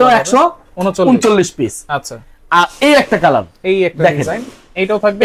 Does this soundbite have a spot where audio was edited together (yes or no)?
no